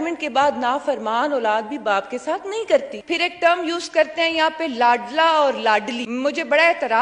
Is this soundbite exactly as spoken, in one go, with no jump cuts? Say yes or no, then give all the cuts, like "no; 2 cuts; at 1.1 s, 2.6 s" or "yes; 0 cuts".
no; 2 cuts; at 2.9 s, 6.0 s